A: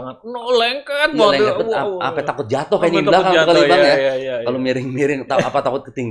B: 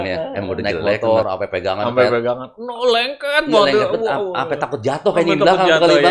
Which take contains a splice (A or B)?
B